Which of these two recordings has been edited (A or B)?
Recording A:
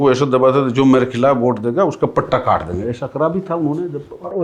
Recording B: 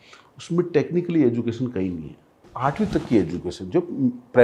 B